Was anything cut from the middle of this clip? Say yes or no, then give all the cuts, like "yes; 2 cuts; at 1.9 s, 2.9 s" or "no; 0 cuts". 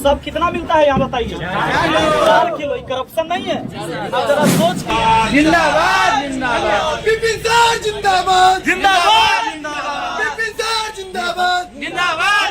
yes; 1 cut; at 4.8 s